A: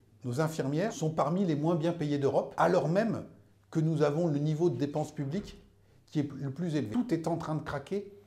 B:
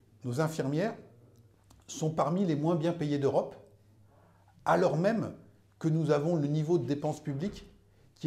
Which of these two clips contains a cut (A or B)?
A